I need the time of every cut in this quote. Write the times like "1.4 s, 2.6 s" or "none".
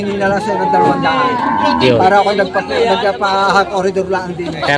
none